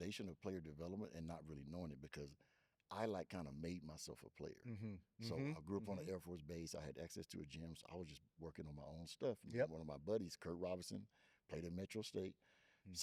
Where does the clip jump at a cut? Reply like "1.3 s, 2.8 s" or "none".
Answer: none